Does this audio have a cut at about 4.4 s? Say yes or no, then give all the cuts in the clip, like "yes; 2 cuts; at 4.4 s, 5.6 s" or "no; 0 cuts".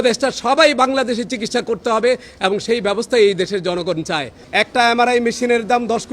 yes; 1 cut; at 4.4 s